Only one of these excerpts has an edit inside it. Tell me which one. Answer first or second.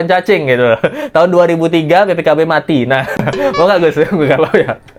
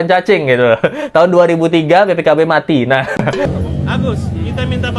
second